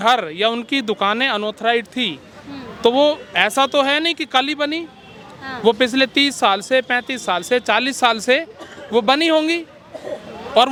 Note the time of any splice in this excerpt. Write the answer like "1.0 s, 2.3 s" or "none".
none